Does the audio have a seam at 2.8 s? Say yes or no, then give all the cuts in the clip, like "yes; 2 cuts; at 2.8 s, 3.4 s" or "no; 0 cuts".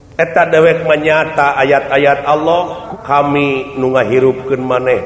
yes; 1 cut; at 2.8 s